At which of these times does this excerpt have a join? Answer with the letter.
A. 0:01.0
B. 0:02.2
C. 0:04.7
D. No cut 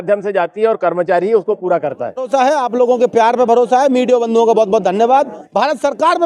B